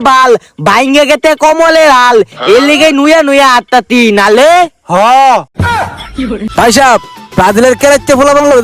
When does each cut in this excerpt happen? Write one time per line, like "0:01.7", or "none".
0:06.5